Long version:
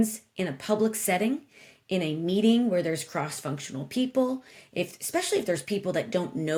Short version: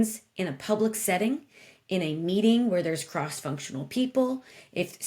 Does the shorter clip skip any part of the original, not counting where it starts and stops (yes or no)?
no